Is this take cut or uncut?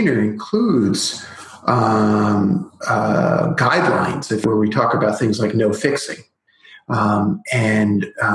cut